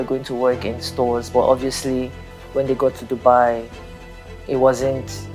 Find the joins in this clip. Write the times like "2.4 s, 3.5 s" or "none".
none